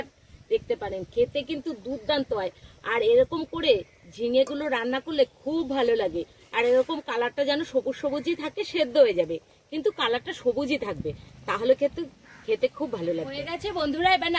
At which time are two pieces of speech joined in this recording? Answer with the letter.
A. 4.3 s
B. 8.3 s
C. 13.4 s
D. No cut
C